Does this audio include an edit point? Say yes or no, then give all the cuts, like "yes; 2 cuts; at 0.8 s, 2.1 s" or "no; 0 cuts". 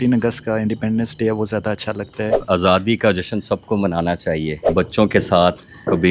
yes; 2 cuts; at 2.3 s, 4.6 s